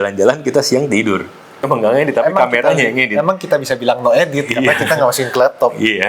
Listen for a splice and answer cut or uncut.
cut